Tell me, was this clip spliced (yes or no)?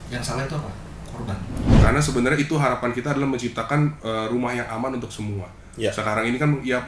yes